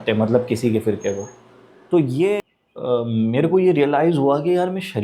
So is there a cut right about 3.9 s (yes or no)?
no